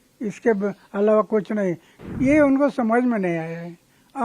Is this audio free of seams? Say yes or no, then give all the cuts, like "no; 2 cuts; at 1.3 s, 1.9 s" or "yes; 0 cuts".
no; 1 cut; at 1.9 s